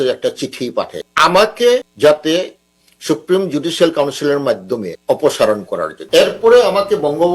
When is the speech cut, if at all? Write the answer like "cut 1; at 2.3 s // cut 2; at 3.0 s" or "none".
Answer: cut 1; at 1.1 s // cut 2; at 1.9 s // cut 3; at 4.9 s // cut 4; at 6.0 s